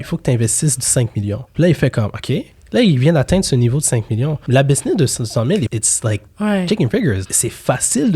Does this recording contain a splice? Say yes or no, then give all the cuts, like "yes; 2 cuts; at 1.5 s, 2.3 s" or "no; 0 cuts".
yes; 4 cuts; at 1.5 s, 4.4 s, 5.7 s, 7.3 s